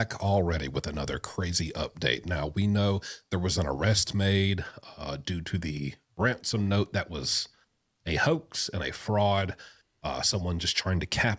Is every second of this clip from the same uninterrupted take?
yes; 0 cuts

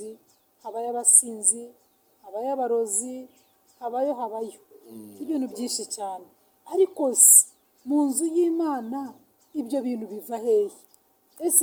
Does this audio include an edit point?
no; 0 cuts

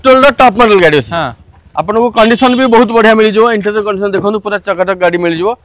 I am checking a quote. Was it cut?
no; 0 cuts

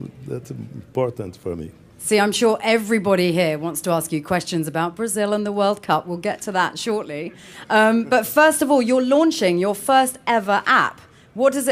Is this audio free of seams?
no; 1 cut; at 6.9 s

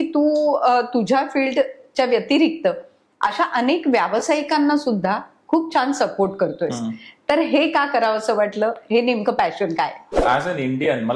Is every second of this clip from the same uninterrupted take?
no; 1 cut; at 10.2 s

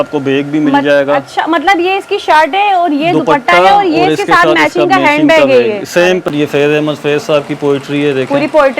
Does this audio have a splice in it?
yes; 1 cut; at 6.3 s

